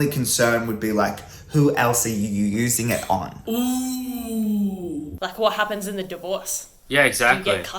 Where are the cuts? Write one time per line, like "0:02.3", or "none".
0:05.2